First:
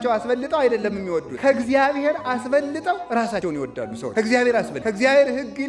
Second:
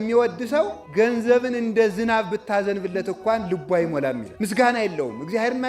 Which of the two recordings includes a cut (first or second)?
first